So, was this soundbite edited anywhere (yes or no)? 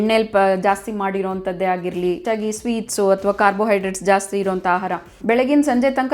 yes